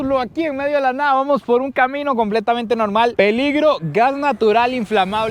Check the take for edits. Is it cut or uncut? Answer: uncut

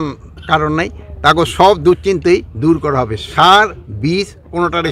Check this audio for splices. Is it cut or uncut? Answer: uncut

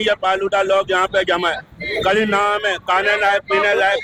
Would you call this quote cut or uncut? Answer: uncut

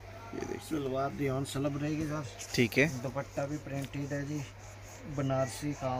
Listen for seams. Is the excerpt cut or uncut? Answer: uncut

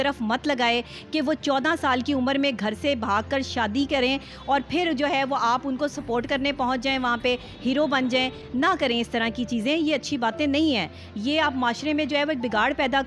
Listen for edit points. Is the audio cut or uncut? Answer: uncut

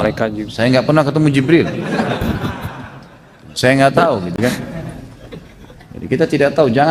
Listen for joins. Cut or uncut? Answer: uncut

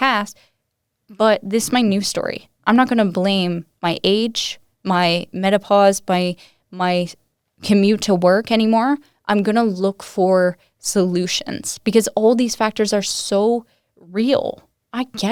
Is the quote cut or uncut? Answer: uncut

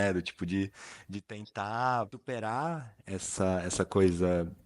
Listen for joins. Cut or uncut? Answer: cut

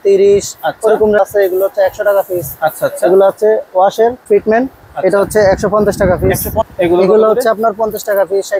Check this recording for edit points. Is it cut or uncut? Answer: cut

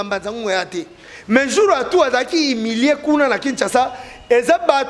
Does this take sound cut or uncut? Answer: uncut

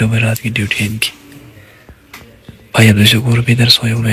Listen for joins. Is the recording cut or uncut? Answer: uncut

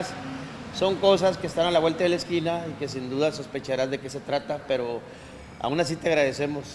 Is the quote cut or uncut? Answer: cut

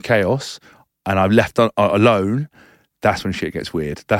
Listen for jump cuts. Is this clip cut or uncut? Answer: uncut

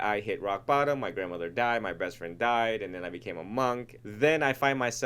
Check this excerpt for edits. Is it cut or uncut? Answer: cut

